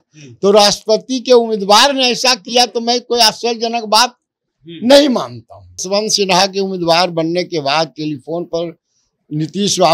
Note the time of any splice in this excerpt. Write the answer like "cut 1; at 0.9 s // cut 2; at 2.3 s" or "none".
cut 1; at 5.8 s